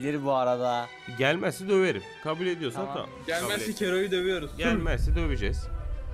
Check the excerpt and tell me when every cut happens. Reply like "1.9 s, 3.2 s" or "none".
1.0 s, 2.1 s